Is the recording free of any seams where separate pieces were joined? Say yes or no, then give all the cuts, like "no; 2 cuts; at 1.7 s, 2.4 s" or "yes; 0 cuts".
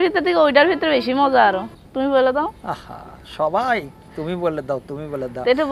no; 1 cut; at 1.8 s